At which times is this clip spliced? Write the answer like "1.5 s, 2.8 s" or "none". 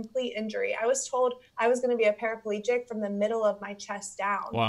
1.5 s

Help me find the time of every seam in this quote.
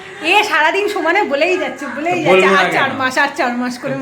none

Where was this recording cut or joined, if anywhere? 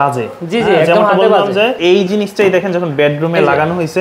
1.8 s

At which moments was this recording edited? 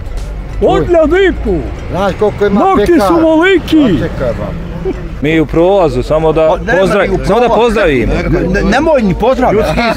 5.1 s

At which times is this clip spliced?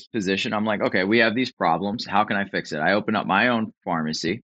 none

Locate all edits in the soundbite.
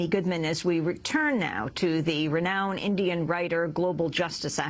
none

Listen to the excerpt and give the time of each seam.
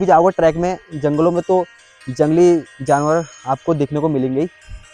none

